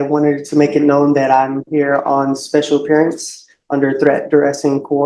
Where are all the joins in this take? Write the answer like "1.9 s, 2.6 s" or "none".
none